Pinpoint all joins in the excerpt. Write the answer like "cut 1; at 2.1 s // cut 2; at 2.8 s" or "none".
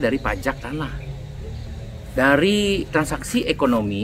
none